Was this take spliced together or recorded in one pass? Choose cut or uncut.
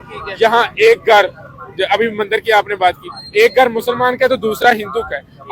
uncut